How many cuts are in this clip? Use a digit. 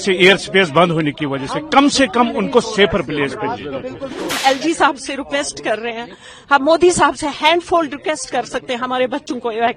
1